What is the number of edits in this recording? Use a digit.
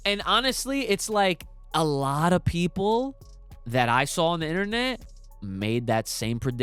0